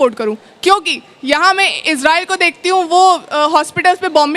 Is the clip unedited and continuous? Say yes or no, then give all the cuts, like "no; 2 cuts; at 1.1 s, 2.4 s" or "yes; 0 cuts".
yes; 0 cuts